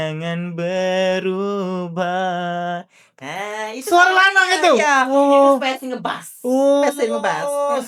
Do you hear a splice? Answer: no; 0 cuts

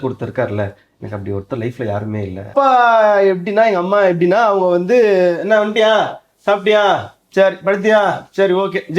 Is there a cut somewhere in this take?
yes; 1 cut; at 2.5 s

